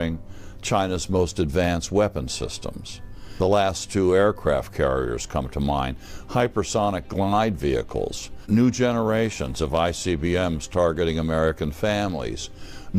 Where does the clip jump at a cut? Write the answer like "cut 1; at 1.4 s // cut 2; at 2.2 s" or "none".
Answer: cut 1; at 3.3 s // cut 2; at 8.3 s

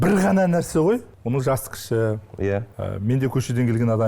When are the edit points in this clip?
cut 1; at 1.1 s // cut 2; at 2.7 s

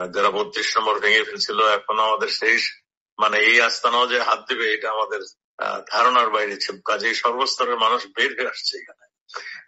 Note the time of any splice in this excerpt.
none

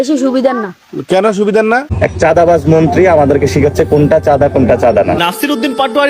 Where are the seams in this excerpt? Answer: cut 1; at 1.9 s

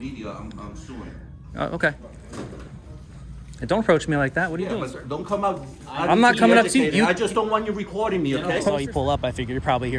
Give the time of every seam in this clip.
cut 1; at 2.1 s // cut 2; at 4.7 s // cut 3; at 8.7 s

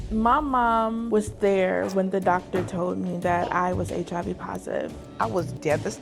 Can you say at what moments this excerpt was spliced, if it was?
cut 1; at 1.0 s // cut 2; at 5.0 s

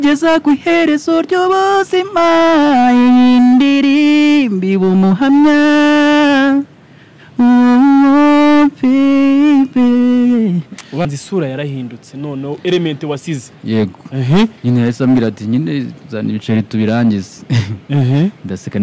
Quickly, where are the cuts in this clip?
cut 1; at 11.0 s

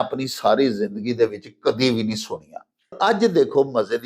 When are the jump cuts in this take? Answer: cut 1; at 2.9 s

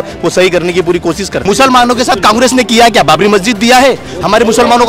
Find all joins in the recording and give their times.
cut 1; at 1.4 s

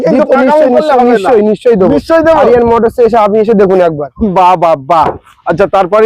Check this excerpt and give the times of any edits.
none

